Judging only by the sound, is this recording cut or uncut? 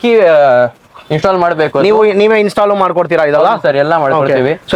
uncut